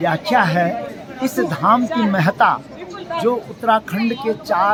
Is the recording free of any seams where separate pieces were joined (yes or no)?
yes